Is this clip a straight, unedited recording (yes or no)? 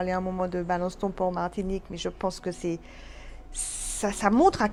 yes